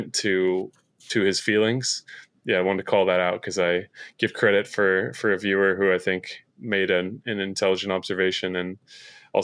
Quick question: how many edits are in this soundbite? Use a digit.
1